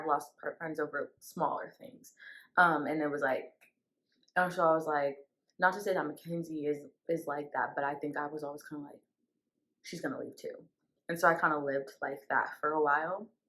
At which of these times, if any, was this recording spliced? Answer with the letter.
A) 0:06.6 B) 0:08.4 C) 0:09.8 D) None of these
D